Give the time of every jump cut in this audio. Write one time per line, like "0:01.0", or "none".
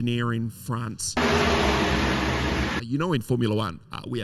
0:01.2
0:02.8